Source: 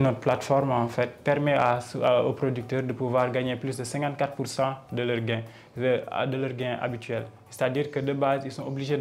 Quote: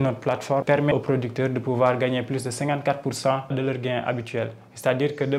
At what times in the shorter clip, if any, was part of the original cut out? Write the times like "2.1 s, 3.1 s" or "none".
0.9 s, 3.5 s